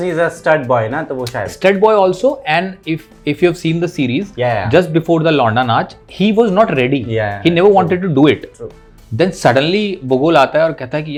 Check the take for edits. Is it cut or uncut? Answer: uncut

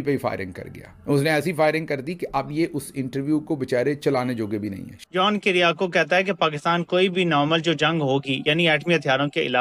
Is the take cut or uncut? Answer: cut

